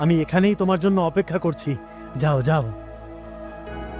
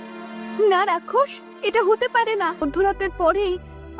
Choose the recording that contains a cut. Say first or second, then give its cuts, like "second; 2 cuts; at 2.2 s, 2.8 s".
second; 1 cut; at 2.7 s